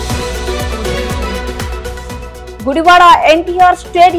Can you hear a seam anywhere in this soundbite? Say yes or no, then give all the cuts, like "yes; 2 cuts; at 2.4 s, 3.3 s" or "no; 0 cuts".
yes; 1 cut; at 1.7 s